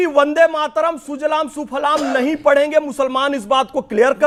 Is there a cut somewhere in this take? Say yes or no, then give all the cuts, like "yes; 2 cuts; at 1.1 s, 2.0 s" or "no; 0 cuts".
no; 0 cuts